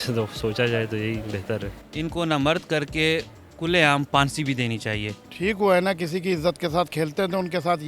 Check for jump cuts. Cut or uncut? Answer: cut